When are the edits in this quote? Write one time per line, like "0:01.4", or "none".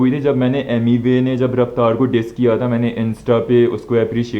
none